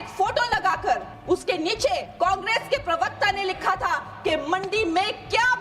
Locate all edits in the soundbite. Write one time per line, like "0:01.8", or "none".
0:01.1
0:02.1

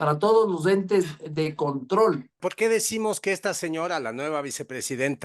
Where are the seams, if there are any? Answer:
0:02.4

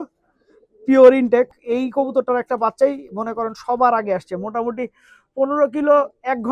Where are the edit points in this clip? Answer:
0:01.5

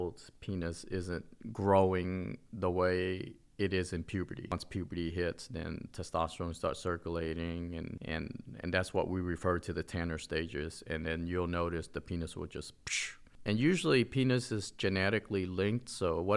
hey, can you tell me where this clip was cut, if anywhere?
0:04.5
0:13.1

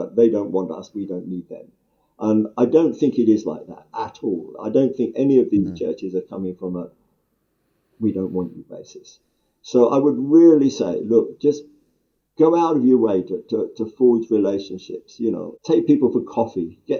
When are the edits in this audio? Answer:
none

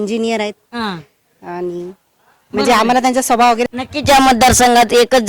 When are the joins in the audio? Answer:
0:03.7

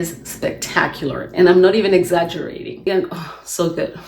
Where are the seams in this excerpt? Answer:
0:02.9

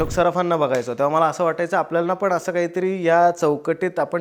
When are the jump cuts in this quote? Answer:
none

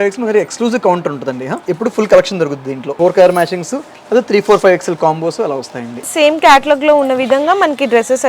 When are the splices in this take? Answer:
0:01.6
0:02.9
0:06.1

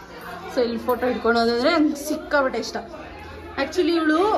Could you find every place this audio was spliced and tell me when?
none

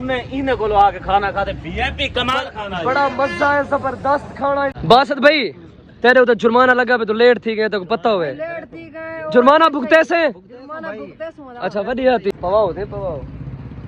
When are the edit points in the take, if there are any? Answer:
0:04.8
0:12.3

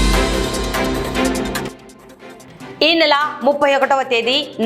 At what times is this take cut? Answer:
0:01.3

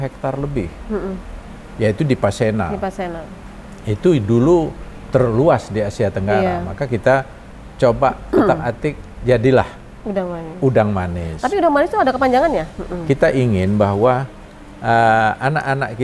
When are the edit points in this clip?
0:12.8

